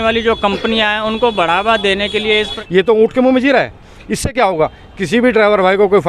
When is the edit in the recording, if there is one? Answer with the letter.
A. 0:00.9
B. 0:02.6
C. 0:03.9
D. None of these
B